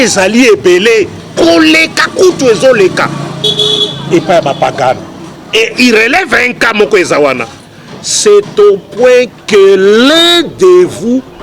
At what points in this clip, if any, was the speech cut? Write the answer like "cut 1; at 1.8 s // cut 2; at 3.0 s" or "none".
none

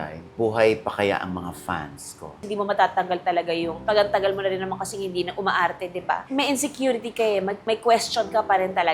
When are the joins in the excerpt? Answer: cut 1; at 2.4 s // cut 2; at 6.2 s

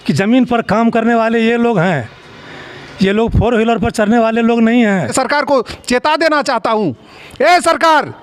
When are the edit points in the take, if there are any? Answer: cut 1; at 5.1 s

